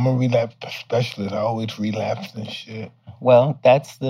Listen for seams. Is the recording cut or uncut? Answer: cut